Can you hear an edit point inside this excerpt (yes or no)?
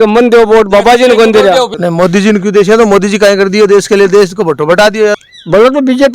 yes